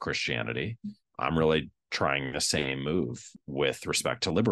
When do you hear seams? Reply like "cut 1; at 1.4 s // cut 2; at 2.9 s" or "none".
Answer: cut 1; at 3.3 s